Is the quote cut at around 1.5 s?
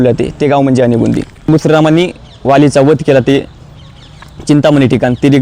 yes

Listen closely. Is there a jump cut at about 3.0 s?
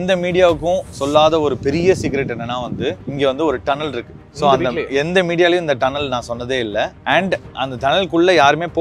yes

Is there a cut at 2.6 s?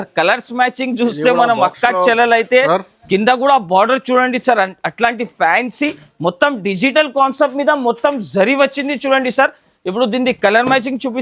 yes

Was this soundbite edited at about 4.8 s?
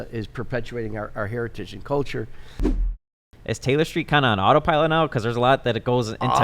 no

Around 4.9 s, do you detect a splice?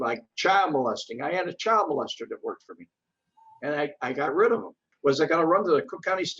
yes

